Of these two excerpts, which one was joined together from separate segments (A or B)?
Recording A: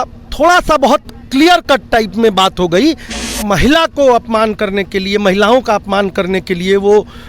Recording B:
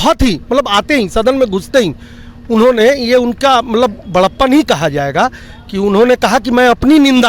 A